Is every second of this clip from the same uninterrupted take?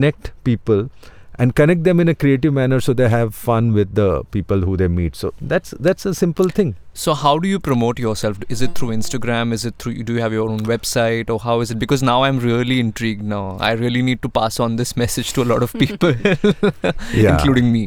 yes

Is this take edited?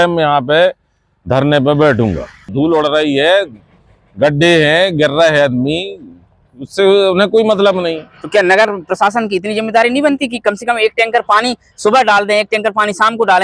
yes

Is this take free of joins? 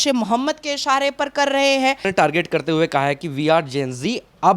no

